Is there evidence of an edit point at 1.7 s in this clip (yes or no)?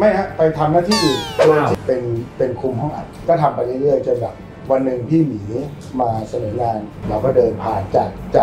yes